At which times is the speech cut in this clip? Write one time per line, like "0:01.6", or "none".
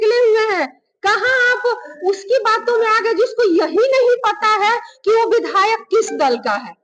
none